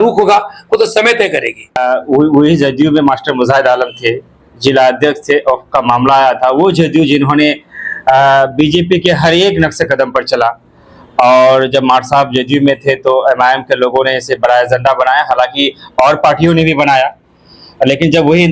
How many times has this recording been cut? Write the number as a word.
one